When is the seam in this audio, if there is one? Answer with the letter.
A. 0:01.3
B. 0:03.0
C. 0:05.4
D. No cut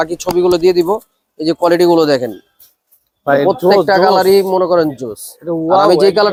D